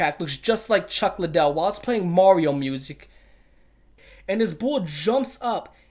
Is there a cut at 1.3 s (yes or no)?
no